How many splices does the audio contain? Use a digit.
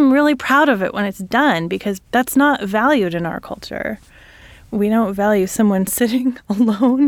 2